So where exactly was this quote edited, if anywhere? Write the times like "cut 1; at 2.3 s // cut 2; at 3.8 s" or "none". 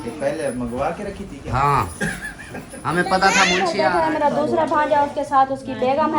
cut 1; at 3.7 s